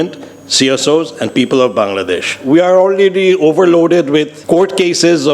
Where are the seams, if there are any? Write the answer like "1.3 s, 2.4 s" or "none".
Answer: 2.3 s, 4.4 s